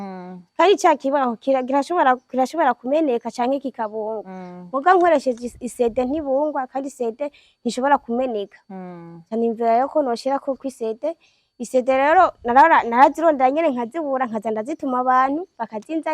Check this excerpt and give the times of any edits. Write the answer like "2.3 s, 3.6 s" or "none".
none